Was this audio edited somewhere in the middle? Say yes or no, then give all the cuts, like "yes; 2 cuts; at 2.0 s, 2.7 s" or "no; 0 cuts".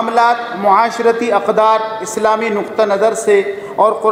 no; 0 cuts